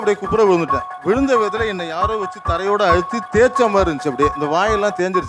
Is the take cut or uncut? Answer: uncut